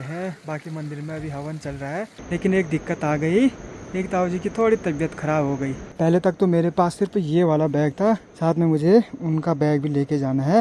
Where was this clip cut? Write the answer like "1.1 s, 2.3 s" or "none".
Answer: 2.2 s, 5.8 s, 8.3 s